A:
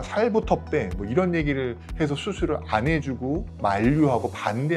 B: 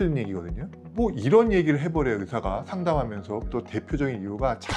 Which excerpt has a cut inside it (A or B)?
B